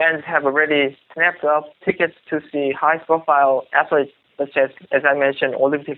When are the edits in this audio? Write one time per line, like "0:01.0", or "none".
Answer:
0:01.1